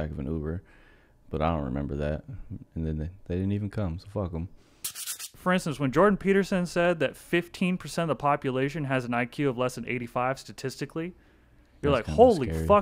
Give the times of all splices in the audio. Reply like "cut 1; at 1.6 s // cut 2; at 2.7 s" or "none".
cut 1; at 5.2 s